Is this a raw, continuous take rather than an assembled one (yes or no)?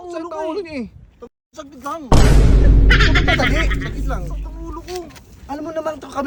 yes